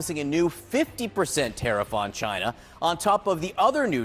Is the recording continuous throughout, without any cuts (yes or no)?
yes